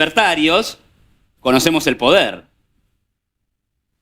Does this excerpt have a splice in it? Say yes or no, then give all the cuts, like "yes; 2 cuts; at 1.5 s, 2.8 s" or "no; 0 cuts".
no; 0 cuts